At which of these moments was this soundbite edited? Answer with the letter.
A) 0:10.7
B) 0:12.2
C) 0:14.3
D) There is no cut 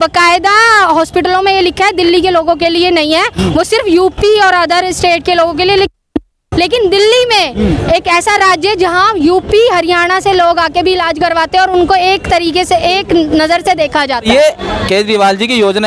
C